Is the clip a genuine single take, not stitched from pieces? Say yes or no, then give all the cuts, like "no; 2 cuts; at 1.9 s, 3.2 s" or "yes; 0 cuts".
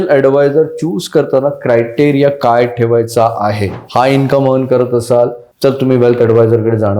no; 2 cuts; at 3.8 s, 5.4 s